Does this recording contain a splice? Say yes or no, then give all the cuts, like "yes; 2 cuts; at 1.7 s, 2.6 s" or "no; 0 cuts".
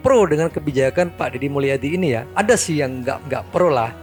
no; 0 cuts